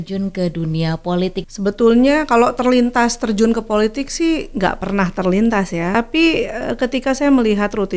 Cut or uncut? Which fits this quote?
cut